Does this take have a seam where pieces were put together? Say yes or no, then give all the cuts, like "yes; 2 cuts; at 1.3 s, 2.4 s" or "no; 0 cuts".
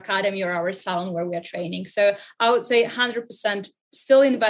no; 0 cuts